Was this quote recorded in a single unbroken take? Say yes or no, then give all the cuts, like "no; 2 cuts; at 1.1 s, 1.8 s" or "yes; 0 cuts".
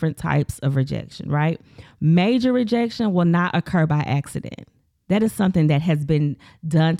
yes; 0 cuts